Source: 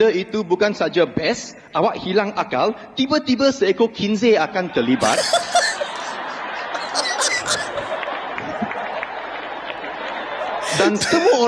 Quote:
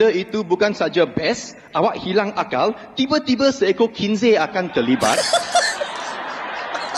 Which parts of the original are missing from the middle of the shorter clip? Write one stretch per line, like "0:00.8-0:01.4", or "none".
none